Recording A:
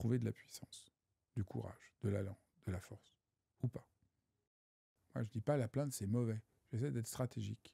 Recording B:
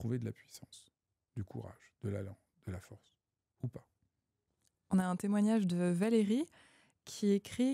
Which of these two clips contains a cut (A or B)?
A